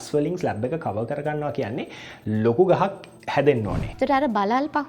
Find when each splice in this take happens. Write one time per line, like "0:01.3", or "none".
0:03.8